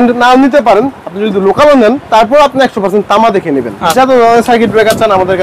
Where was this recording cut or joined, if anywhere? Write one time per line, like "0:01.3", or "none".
0:02.0
0:03.8